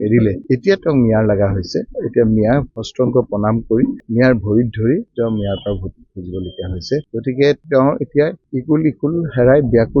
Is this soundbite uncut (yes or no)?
yes